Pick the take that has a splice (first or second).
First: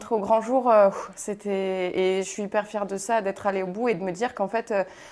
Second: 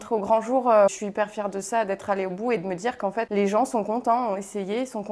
second